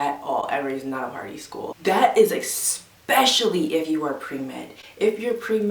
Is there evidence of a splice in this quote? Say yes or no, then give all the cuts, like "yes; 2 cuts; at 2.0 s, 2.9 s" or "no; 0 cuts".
yes; 1 cut; at 1.7 s